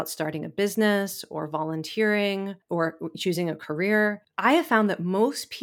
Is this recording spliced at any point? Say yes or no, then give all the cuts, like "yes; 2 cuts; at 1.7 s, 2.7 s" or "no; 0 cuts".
yes; 2 cuts; at 2.6 s, 4.3 s